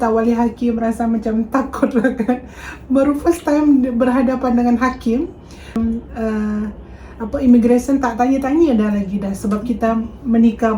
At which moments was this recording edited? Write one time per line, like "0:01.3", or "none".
0:05.8